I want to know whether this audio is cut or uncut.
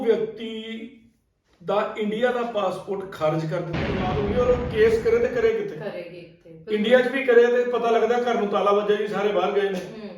cut